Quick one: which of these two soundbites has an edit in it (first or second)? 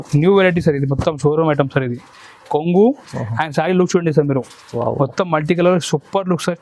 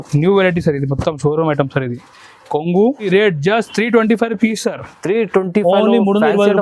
second